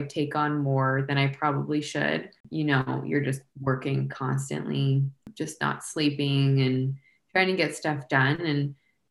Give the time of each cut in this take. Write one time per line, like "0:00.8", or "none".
0:02.4
0:05.3